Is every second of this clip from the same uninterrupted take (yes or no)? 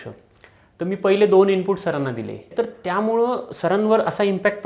no